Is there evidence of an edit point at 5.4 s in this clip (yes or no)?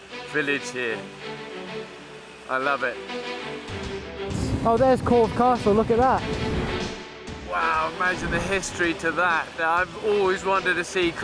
no